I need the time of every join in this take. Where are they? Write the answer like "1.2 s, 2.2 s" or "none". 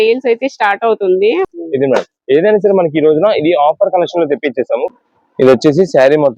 1.5 s, 5.0 s